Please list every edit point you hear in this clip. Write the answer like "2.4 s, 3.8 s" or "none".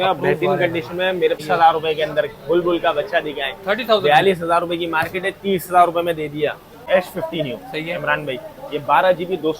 1.4 s, 6.8 s